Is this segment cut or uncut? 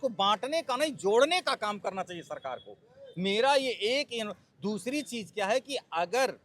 uncut